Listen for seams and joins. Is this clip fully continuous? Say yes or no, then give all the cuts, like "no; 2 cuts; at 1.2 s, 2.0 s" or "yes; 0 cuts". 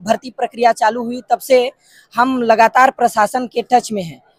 yes; 0 cuts